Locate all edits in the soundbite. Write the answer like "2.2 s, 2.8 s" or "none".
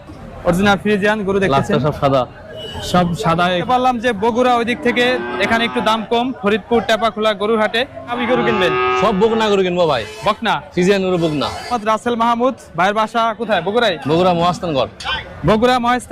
3.6 s, 8.2 s, 11.8 s